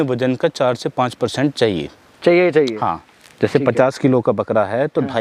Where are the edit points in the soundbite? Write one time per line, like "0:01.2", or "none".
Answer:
none